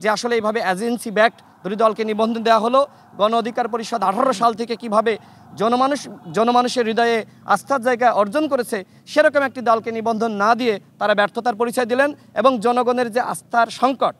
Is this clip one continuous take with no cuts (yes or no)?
yes